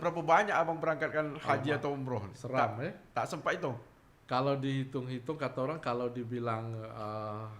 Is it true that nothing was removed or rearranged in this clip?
yes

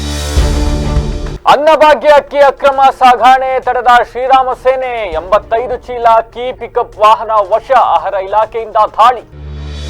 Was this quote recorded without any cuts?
no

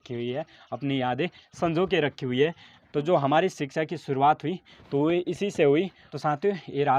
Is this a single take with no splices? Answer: no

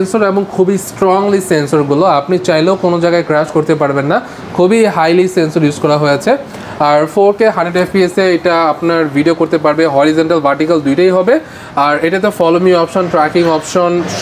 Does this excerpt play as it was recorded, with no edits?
yes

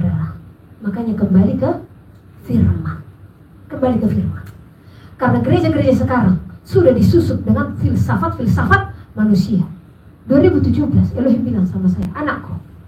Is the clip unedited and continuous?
yes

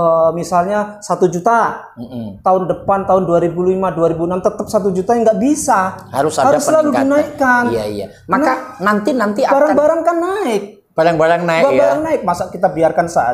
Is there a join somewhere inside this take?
no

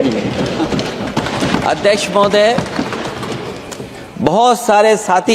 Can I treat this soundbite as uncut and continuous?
no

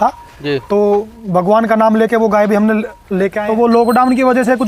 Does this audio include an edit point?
yes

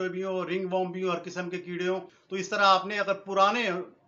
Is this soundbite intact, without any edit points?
no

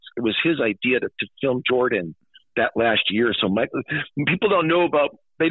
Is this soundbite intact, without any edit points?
yes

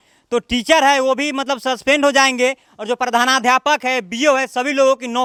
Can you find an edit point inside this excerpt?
no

